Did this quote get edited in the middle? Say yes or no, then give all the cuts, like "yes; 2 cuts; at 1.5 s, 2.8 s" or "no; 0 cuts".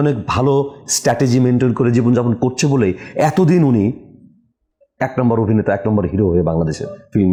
no; 0 cuts